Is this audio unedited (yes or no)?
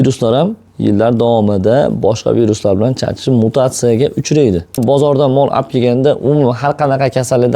no